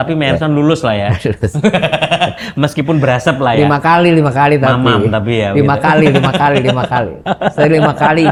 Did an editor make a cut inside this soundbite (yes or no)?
no